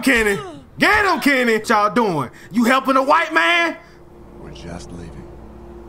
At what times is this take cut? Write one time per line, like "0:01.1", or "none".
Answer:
0:01.6